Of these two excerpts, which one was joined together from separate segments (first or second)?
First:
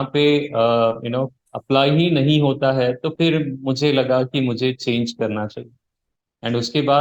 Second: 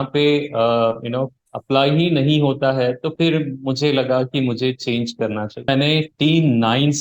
second